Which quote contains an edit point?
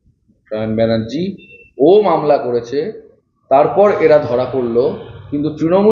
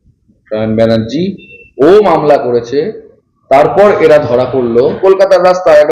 second; 1 cut; at 5.0 s

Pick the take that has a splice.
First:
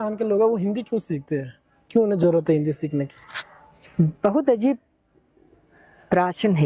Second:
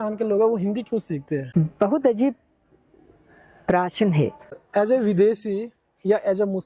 second; 2 cuts; at 1.5 s, 4.5 s

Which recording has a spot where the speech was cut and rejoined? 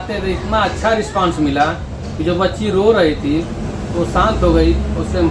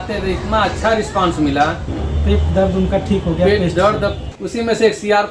second; 2 cuts; at 1.9 s, 4.3 s

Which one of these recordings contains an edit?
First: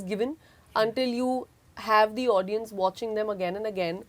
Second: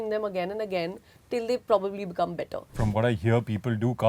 second; 1 cut; at 2.7 s

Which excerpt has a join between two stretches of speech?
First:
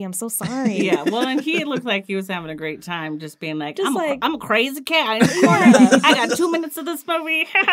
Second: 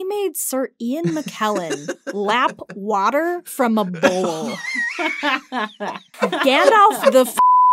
second; 1 cut; at 6.1 s

